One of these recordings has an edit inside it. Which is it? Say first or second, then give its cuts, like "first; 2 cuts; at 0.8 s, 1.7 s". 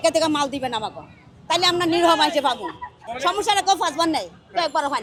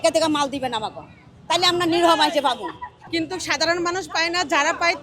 second; 1 cut; at 3.0 s